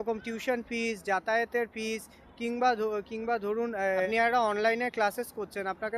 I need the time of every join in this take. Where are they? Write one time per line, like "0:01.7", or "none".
0:04.1